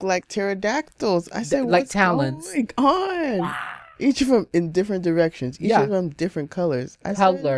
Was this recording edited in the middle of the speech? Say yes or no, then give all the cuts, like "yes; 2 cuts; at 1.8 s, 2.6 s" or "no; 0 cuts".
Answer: no; 0 cuts